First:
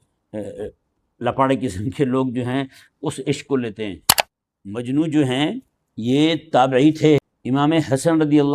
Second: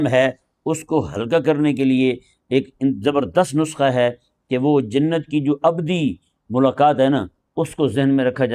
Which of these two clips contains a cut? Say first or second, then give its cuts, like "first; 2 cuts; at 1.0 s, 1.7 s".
first; 1 cut; at 7.3 s